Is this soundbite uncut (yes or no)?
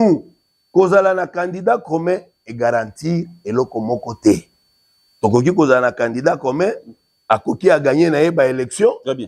yes